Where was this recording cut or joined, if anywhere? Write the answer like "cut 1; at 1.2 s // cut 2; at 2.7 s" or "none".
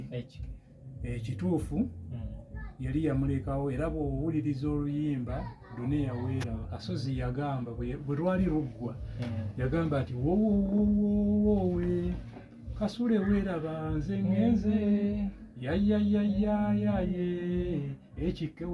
cut 1; at 6.7 s